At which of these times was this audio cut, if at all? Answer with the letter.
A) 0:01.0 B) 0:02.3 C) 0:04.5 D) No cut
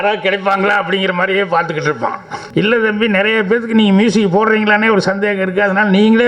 B